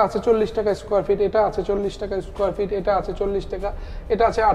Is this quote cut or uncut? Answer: uncut